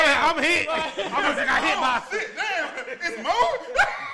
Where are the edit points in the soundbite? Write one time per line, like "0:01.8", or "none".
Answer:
none